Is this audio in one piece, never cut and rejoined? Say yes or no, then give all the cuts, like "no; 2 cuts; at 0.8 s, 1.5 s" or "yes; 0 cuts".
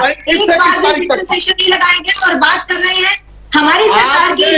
yes; 0 cuts